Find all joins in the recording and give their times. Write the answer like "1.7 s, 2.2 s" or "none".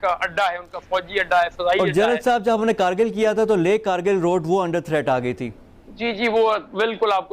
none